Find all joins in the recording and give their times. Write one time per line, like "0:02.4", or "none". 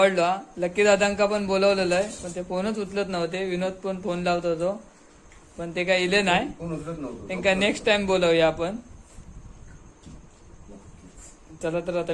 none